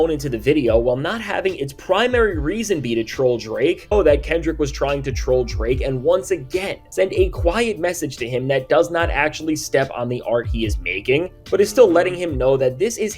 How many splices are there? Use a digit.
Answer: 1